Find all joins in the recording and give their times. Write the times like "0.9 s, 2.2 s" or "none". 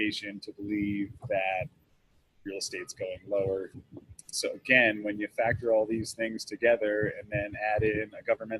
3.7 s